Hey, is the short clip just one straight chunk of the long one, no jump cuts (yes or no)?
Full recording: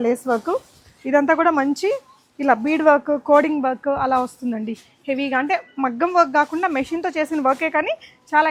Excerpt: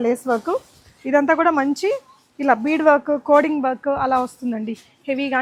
yes